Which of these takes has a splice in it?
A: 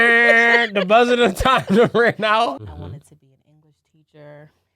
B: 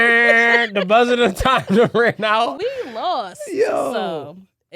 A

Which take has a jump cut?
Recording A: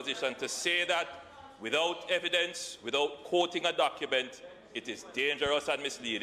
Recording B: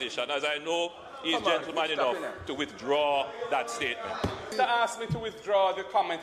B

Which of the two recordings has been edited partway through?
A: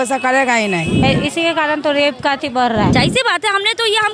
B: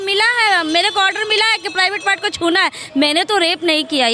A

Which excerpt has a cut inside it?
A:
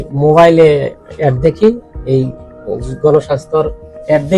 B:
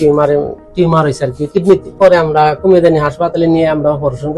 B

